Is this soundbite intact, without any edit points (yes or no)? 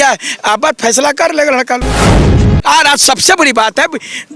no